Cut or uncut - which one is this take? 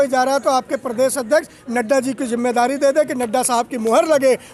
uncut